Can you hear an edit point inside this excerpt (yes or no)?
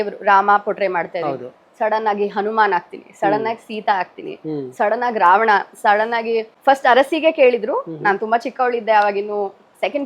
yes